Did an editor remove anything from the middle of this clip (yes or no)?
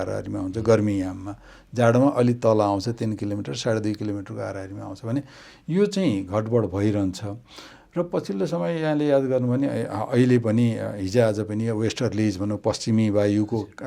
no